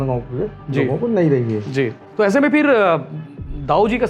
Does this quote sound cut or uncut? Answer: cut